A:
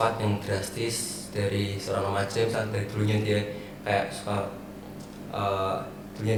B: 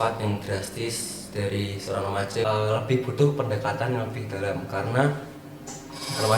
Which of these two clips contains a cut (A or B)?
B